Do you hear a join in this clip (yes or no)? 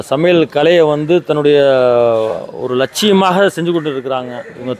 no